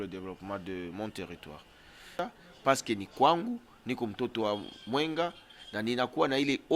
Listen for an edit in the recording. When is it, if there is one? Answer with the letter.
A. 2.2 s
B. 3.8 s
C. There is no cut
A